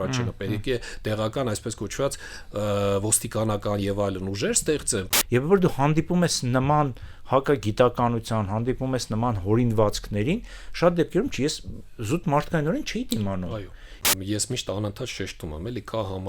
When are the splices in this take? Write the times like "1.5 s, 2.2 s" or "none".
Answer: 5.1 s, 14.1 s